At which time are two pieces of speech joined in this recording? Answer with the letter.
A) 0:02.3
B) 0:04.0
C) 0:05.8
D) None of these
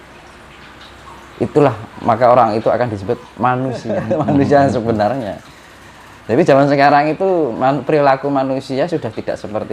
B